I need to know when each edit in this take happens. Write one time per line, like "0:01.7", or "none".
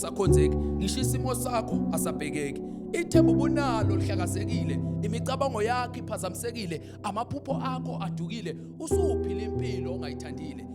none